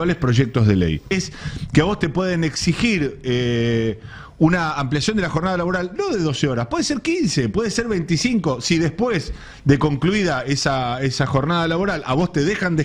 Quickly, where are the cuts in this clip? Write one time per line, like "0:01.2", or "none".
0:01.1

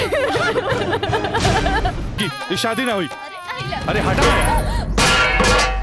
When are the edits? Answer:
0:02.2

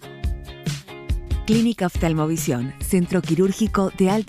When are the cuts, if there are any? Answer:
0:01.5

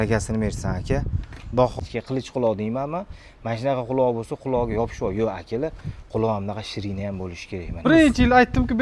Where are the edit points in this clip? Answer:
0:01.8
0:07.8

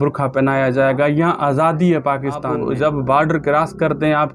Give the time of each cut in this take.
0:02.5

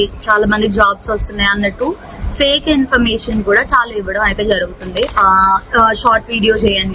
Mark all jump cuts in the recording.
0:05.1

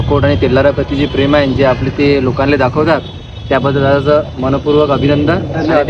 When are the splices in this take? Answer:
none

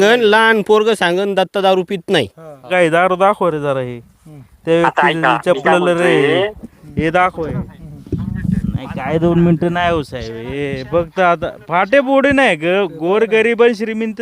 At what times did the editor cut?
0:02.7

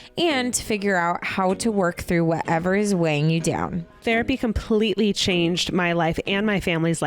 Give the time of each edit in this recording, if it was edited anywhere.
0:03.9

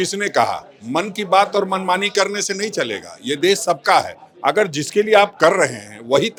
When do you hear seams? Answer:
none

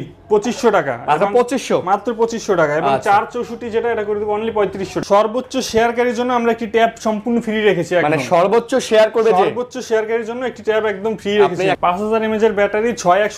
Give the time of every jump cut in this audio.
0:04.9
0:11.8

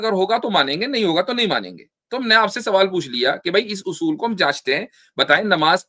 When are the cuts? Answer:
none

